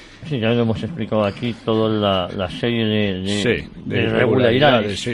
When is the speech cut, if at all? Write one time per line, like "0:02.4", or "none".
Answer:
0:03.3